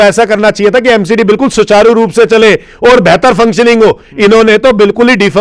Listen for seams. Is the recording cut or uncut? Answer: uncut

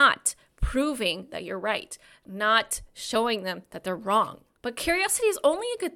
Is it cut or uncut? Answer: cut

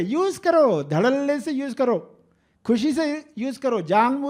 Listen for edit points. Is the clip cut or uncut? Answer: uncut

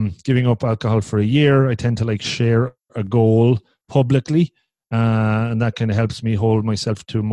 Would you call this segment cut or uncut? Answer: uncut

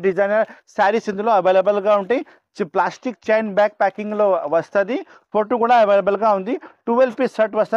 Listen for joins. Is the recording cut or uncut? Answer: uncut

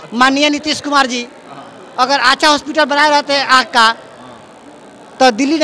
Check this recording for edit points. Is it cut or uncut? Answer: uncut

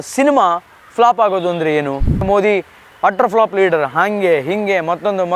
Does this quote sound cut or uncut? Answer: cut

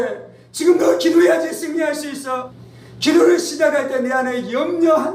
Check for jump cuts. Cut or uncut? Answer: cut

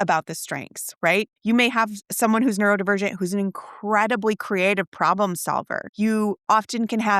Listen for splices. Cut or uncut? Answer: cut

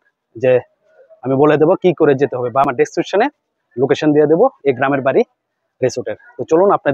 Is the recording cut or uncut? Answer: uncut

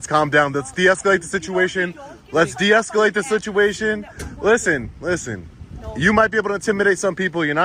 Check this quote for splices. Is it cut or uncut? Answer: uncut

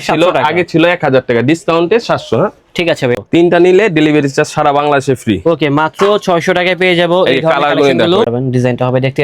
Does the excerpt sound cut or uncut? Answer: cut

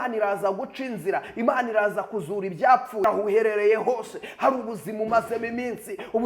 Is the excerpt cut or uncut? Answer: cut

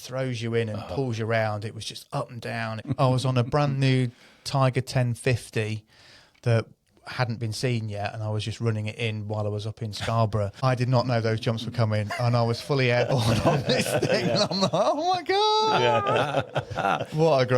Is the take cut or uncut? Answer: cut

